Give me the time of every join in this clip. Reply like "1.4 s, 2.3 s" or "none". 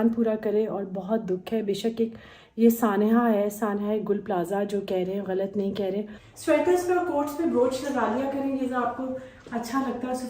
6.2 s